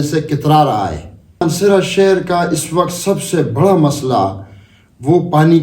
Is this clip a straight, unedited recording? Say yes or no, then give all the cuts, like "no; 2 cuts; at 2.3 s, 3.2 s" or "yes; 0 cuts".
no; 1 cut; at 1.3 s